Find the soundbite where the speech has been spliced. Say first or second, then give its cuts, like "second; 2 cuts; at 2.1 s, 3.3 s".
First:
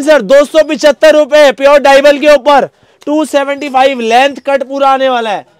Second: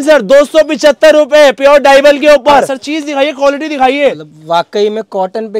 second; 1 cut; at 2.8 s